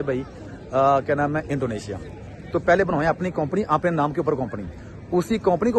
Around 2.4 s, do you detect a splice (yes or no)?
yes